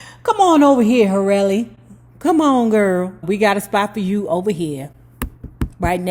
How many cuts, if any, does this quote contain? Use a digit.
1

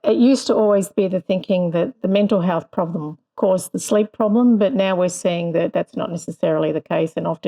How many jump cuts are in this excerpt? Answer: 0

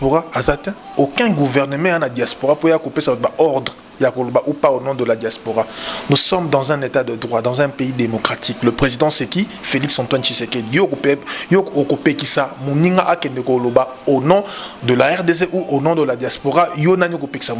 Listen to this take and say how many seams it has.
0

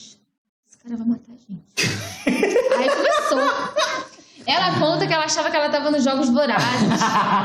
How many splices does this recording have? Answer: 0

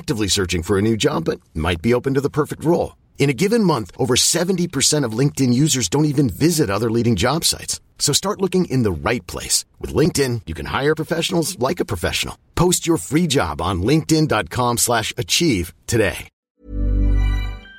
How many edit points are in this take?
1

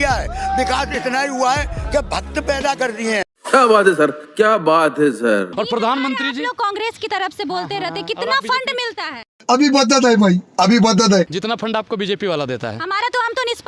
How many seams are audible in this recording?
2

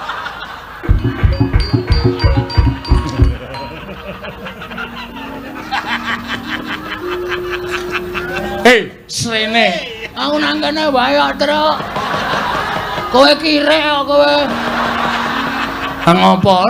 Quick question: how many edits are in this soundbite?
0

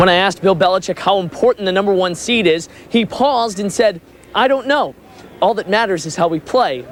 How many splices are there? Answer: 0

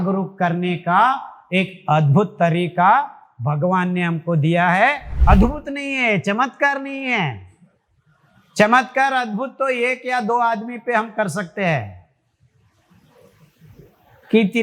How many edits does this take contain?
1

